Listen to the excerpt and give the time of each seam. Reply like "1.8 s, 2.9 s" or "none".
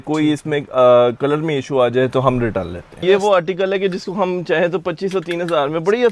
3.0 s